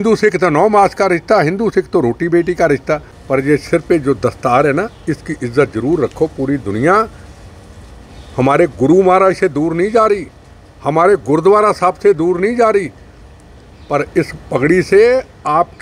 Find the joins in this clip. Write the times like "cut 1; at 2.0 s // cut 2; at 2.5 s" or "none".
cut 1; at 3.1 s

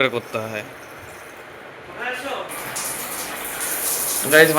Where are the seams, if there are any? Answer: cut 1; at 2.5 s

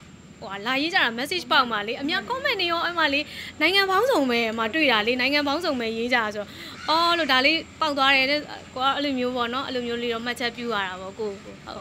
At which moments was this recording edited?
none

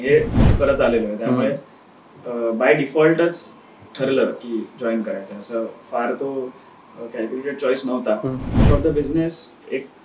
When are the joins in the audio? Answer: cut 1; at 8.5 s

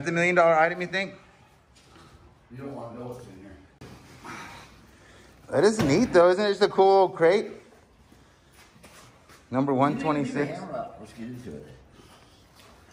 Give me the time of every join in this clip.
cut 1; at 3.8 s

